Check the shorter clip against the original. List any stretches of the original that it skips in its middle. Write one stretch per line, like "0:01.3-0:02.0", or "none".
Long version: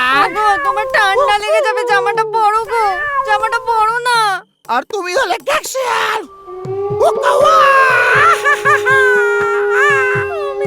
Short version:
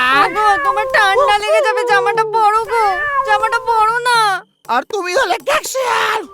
none